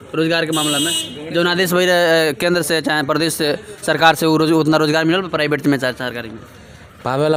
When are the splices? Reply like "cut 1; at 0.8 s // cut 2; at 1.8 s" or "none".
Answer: none